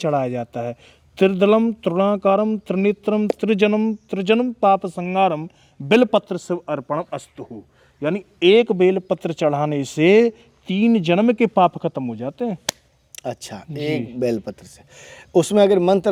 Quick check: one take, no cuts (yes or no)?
yes